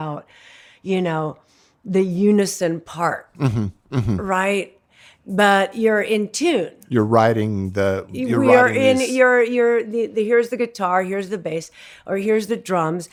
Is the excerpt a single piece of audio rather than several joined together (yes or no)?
yes